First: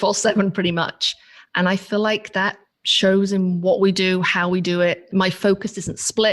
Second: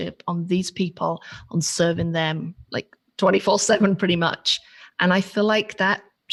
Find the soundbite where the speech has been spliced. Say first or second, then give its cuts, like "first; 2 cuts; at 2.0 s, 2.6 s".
first; 1 cut; at 5.0 s